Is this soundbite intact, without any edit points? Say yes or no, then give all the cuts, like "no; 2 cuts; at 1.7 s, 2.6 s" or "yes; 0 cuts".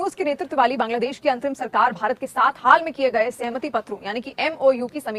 yes; 0 cuts